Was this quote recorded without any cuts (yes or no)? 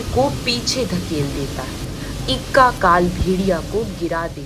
yes